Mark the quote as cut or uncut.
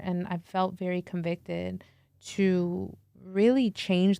uncut